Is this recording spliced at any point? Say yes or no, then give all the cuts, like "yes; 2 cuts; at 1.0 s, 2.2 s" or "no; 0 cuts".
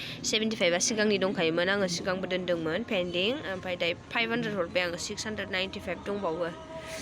no; 0 cuts